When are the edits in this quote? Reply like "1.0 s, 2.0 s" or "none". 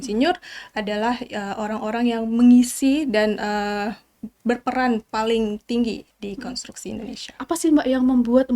7.5 s